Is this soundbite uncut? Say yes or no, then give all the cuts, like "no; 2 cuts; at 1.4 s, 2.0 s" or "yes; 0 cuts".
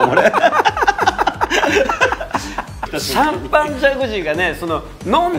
no; 1 cut; at 2.9 s